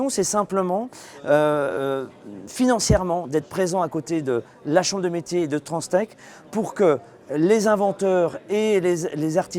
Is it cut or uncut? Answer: uncut